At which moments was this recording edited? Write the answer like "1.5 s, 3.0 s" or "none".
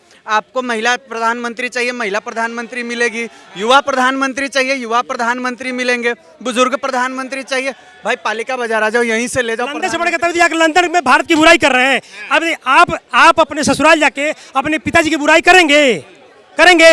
9.8 s